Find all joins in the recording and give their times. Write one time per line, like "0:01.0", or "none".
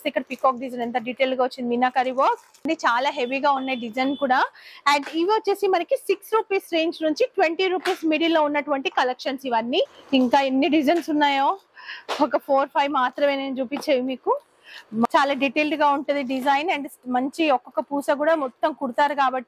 0:02.6
0:10.0
0:15.1